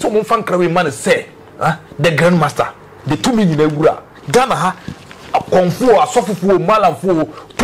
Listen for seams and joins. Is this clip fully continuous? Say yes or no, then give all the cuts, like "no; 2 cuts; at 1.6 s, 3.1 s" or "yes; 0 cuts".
yes; 0 cuts